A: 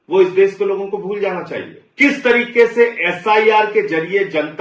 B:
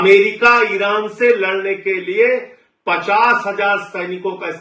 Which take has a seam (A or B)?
A